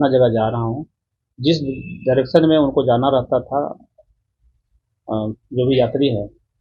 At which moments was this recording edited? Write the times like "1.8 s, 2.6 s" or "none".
none